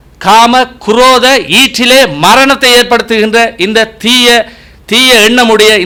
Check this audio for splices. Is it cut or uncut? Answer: uncut